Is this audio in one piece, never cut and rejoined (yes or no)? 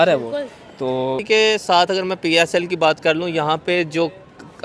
no